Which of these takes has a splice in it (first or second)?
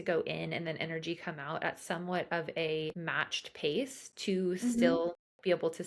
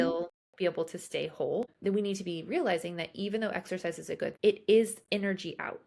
second